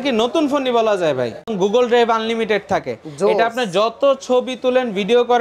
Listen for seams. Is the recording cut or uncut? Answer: cut